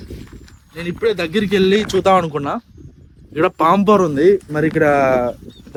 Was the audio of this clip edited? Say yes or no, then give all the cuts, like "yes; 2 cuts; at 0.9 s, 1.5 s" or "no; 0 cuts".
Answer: no; 0 cuts